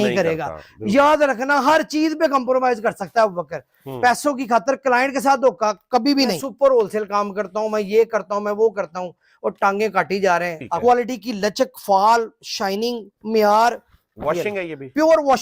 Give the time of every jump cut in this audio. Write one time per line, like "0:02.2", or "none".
0:06.4
0:10.8

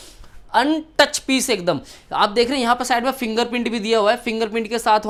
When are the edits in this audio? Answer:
none

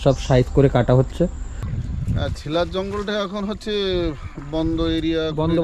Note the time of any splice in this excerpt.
0:01.7

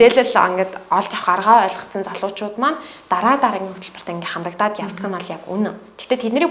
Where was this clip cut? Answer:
none

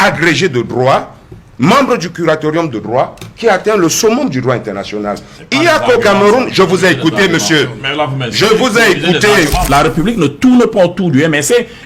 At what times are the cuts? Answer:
0:09.6

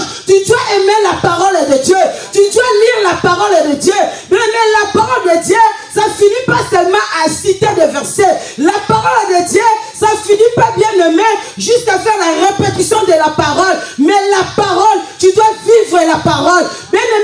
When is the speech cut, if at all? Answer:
none

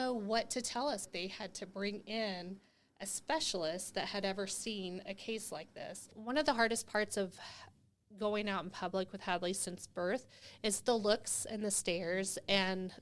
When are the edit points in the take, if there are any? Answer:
0:01.1
0:06.2

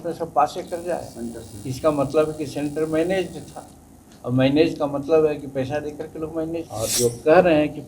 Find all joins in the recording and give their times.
0:06.7

